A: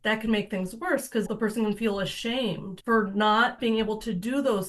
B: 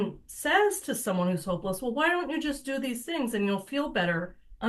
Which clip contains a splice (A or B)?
A